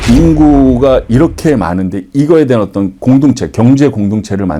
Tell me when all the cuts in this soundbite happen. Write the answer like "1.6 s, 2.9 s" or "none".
none